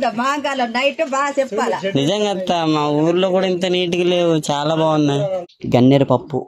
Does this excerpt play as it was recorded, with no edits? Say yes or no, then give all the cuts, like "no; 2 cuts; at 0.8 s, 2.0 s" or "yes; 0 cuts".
no; 1 cut; at 5.5 s